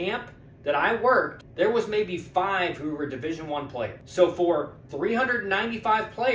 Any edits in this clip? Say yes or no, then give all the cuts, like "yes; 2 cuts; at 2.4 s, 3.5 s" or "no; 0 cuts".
yes; 3 cuts; at 1.4 s, 4.0 s, 4.8 s